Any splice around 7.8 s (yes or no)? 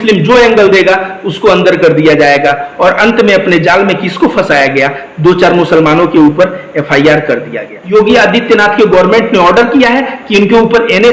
yes